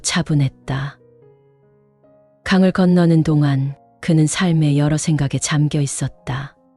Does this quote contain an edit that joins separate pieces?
no; 0 cuts

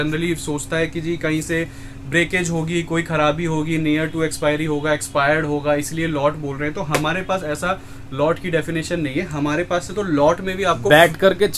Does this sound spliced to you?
no; 0 cuts

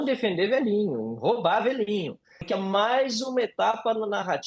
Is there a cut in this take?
yes; 1 cut; at 2.3 s

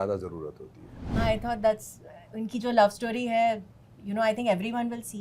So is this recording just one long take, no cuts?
no; 1 cut; at 1.1 s

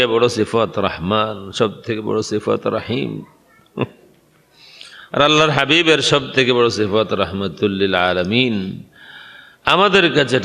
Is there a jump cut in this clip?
no; 0 cuts

